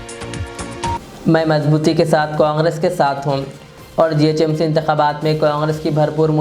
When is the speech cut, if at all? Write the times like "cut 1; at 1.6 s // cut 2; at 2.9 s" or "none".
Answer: cut 1; at 0.9 s